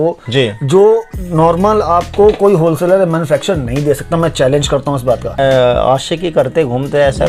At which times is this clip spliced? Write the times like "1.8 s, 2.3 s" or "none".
5.4 s